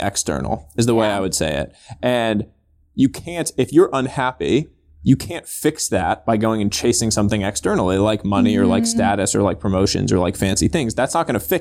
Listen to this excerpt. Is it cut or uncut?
uncut